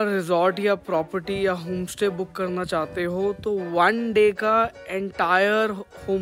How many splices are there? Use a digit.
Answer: 0